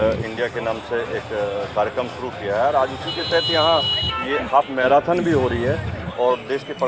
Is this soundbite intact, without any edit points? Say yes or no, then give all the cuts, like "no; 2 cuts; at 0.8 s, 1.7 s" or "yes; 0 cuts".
yes; 0 cuts